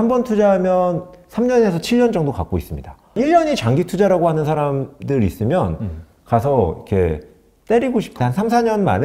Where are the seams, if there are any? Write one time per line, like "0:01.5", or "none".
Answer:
0:03.2
0:08.2